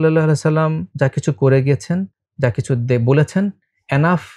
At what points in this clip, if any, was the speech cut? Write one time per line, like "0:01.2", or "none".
0:00.8
0:02.2